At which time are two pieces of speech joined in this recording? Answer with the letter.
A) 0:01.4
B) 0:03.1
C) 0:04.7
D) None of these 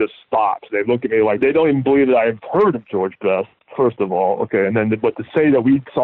A